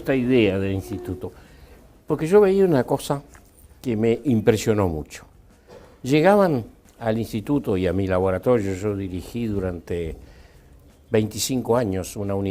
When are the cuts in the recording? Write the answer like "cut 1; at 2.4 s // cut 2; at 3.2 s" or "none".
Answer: cut 1; at 9.4 s